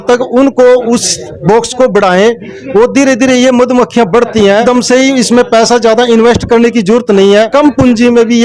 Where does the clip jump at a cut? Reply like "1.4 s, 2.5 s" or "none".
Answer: 4.6 s, 7.5 s